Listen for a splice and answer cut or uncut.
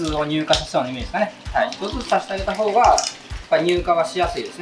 uncut